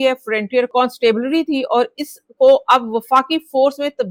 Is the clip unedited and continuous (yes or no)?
yes